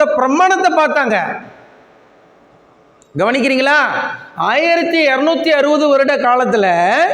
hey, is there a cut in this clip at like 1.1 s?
no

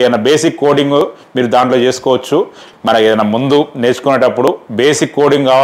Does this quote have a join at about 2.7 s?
yes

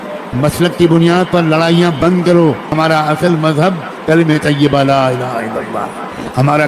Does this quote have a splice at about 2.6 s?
yes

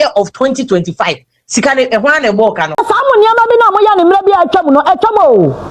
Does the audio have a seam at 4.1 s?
no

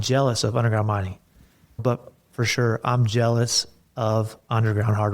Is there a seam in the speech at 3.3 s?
no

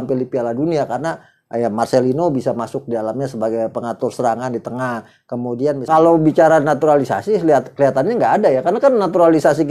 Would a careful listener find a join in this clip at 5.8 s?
yes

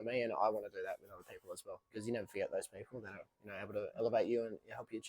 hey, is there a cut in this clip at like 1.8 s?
yes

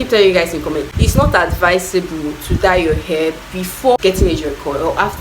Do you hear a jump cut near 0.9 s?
yes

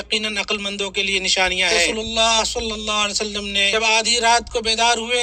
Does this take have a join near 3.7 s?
yes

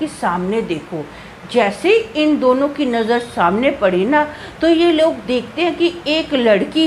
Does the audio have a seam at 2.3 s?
no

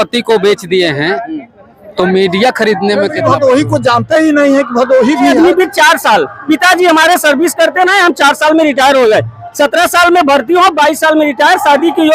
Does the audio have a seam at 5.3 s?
yes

